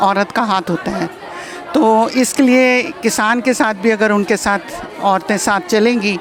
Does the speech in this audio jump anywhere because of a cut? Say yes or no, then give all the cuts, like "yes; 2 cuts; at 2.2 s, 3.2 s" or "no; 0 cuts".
no; 0 cuts